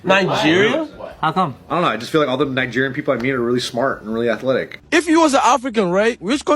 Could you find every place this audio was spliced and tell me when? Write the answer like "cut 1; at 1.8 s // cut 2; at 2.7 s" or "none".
cut 1; at 4.8 s